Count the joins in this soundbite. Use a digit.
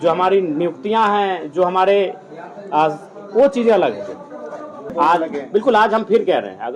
1